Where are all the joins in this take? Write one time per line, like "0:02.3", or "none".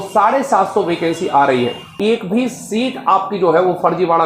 0:01.9